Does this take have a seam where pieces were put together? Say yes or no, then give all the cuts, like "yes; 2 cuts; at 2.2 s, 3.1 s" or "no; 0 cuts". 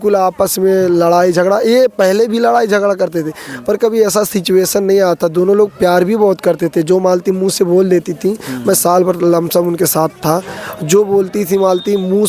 no; 0 cuts